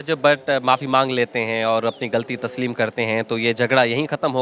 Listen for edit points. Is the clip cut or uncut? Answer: uncut